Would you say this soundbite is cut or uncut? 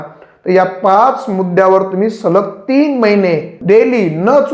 cut